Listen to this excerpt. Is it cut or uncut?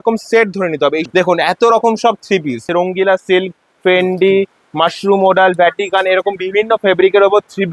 cut